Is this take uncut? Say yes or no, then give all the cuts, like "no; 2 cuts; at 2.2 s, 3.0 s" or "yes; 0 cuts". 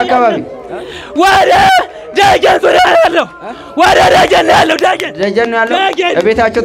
yes; 0 cuts